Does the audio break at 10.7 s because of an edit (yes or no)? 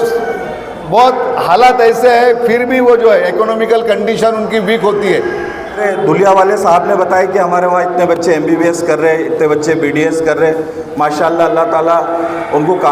no